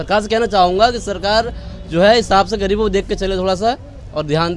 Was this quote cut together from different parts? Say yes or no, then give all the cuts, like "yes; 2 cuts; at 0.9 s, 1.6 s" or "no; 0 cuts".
no; 0 cuts